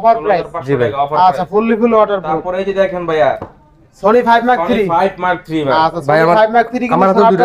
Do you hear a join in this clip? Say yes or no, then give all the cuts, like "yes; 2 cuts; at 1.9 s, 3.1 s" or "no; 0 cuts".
no; 0 cuts